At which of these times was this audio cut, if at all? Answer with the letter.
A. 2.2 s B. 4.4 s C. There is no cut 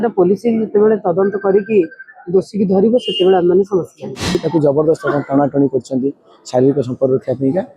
B